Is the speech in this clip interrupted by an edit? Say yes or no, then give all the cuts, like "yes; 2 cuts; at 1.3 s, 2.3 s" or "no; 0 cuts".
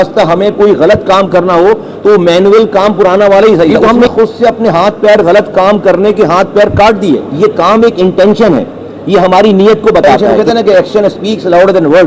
yes; 3 cuts; at 3.9 s, 7.3 s, 10.2 s